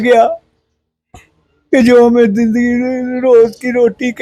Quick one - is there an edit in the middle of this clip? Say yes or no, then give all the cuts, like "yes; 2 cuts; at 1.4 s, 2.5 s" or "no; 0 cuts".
no; 0 cuts